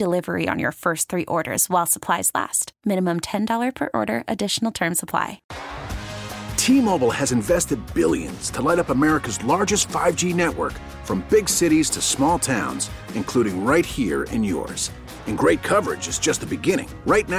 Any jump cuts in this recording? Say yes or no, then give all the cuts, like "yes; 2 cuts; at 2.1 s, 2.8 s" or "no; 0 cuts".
yes; 1 cut; at 5.4 s